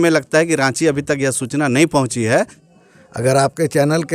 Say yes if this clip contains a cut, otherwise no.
yes